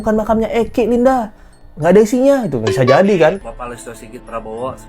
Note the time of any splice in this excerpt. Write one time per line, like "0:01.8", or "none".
0:03.5